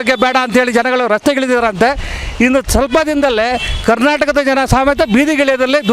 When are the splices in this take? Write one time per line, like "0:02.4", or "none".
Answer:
none

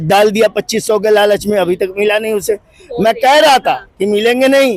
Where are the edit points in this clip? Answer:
none

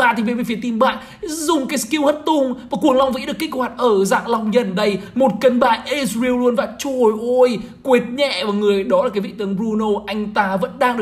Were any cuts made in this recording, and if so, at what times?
none

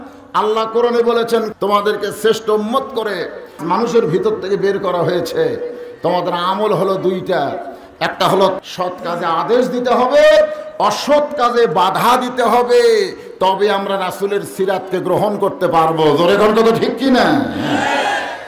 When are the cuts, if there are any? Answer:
0:01.5
0:03.6
0:08.6

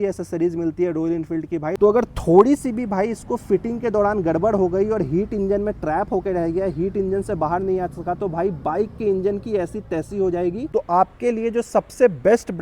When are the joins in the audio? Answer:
0:01.7
0:10.7

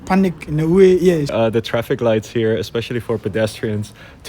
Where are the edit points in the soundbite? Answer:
0:01.3

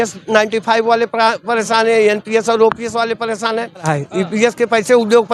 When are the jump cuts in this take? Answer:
0:03.8

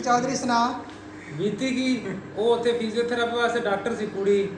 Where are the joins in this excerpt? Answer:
none

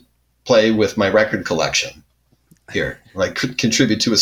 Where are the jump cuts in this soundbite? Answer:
none

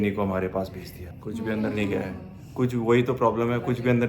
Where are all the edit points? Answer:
0:01.1

